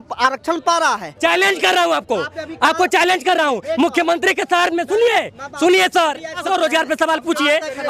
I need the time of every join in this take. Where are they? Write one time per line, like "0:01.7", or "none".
0:01.1
0:06.4